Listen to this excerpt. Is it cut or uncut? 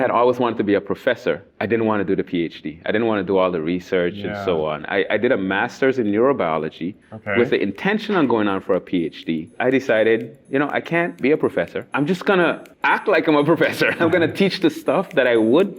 cut